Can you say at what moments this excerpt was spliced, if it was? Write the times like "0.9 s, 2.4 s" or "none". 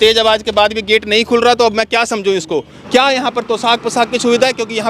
2.8 s